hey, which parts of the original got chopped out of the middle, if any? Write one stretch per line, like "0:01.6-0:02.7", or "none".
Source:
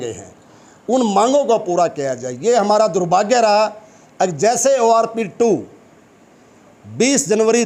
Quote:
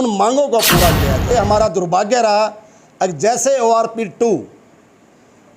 0:02.3-0:02.5

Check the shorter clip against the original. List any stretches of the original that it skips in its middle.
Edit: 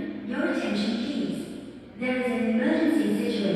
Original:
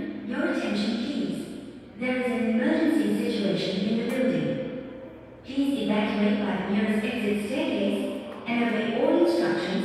none

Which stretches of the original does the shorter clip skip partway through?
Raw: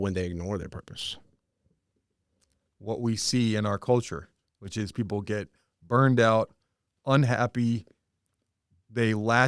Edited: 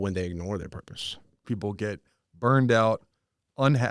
0:01.4-0:04.9

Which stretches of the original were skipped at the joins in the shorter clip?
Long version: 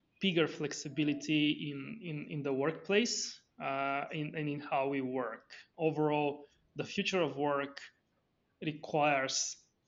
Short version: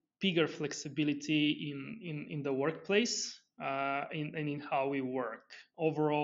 none

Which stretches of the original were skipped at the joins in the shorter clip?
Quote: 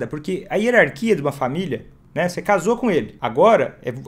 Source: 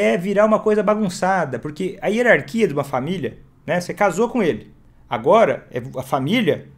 0:04.7-0:05.1

